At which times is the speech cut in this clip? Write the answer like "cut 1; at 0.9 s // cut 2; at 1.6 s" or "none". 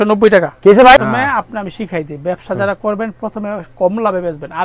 cut 1; at 1.0 s